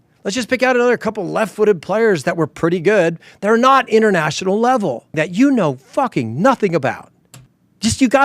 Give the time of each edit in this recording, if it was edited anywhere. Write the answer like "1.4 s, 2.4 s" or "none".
5.2 s